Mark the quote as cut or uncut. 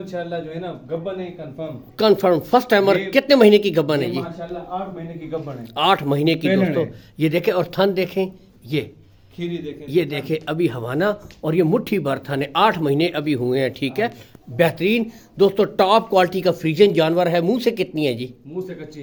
uncut